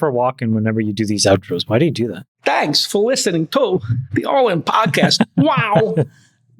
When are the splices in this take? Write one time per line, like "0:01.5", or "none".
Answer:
0:02.2